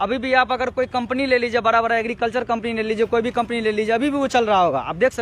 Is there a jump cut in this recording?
no; 0 cuts

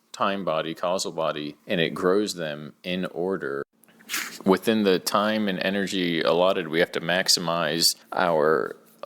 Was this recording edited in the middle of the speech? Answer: yes; 1 cut; at 3.8 s

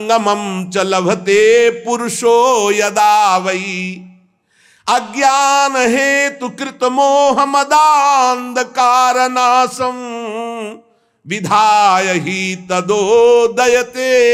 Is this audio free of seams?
yes; 0 cuts

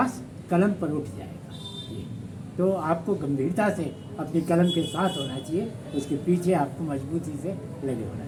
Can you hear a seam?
no; 0 cuts

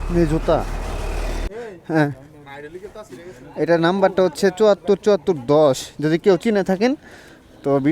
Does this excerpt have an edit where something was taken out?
yes; 1 cut; at 1.4 s

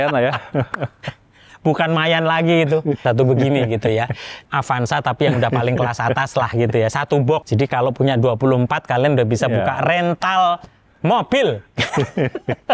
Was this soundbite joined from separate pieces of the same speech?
yes; 3 cuts; at 3.0 s, 4.4 s, 7.4 s

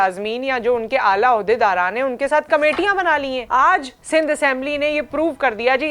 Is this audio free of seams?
no; 1 cut; at 3.4 s

